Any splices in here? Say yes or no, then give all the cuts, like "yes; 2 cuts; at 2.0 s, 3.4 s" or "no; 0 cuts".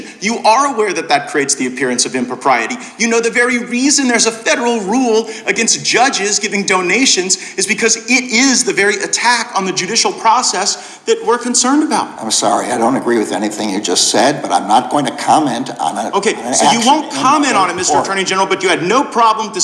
no; 0 cuts